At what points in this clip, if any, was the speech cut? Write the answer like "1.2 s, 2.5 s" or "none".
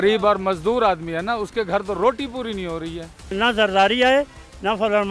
3.3 s